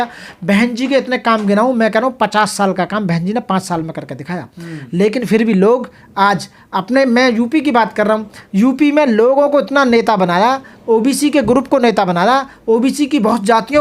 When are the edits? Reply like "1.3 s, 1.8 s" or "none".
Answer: none